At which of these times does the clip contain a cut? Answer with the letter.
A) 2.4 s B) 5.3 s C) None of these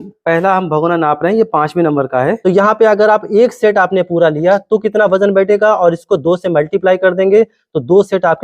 A